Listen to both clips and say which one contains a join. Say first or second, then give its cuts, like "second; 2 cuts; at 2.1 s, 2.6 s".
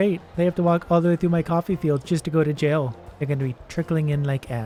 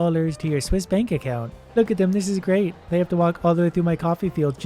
second; 1 cut; at 1.6 s